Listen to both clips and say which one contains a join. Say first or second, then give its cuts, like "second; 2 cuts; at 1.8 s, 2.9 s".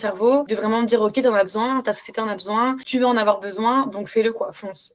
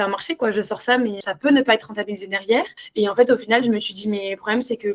second; 2 cuts; at 1.2 s, 2.8 s